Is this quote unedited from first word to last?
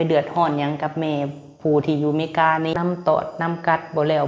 no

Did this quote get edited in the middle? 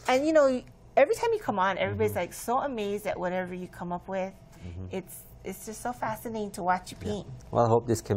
no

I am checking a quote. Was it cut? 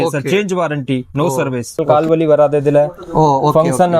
yes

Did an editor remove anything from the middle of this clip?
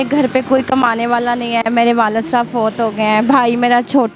no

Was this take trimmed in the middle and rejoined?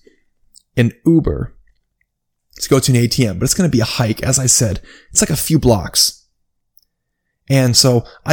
no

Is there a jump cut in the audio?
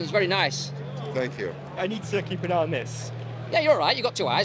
yes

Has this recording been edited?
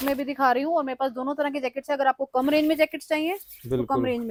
no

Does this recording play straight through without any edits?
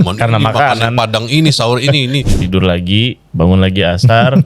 no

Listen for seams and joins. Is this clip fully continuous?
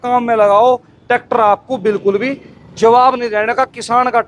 yes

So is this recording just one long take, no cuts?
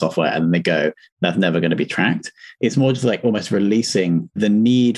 no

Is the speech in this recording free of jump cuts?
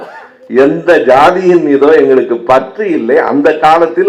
yes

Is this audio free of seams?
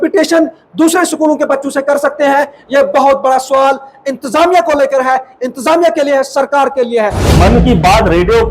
no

